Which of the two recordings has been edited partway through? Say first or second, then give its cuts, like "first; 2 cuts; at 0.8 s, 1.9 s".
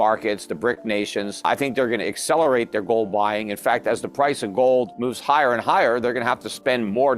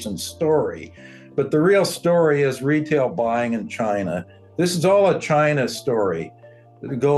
first; 2 cuts; at 1.4 s, 5.0 s